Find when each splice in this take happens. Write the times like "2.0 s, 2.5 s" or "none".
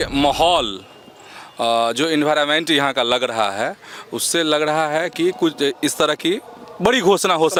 none